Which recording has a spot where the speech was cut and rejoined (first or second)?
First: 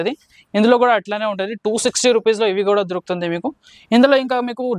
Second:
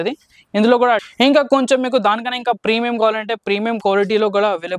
second